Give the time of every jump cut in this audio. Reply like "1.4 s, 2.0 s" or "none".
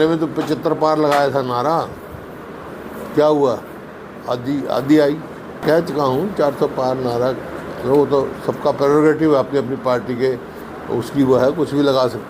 5.6 s